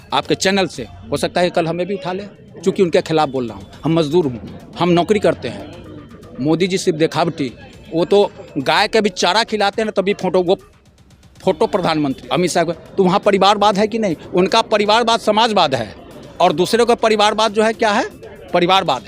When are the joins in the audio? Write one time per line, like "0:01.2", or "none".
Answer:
0:12.2

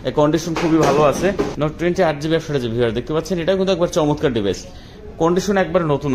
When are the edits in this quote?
0:01.5

